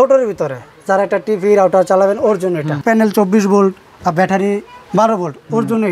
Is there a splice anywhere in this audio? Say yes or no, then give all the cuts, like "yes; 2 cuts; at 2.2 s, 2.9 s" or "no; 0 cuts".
yes; 1 cut; at 2.8 s